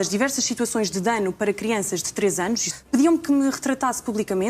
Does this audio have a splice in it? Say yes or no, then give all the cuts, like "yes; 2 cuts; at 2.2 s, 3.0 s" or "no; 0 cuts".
yes; 1 cut; at 2.7 s